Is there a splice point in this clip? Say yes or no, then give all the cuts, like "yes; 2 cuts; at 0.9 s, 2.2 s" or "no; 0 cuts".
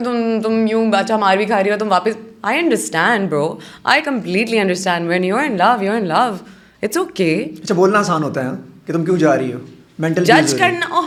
no; 0 cuts